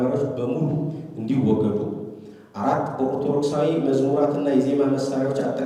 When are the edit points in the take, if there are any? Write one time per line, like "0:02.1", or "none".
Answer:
none